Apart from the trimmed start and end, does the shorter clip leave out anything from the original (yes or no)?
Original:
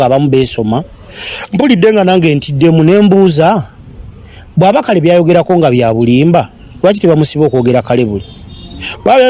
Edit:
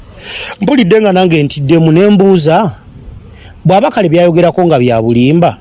no